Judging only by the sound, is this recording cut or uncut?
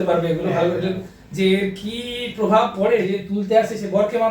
cut